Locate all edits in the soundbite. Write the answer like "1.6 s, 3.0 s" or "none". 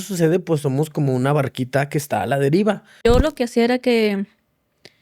2.9 s